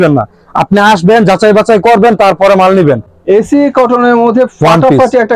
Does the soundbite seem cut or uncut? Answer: cut